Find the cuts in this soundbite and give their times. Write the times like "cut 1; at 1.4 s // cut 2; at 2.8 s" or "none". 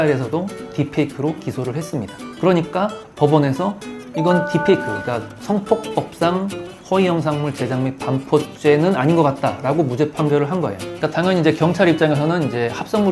none